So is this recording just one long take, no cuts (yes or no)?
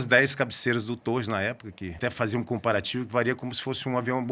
no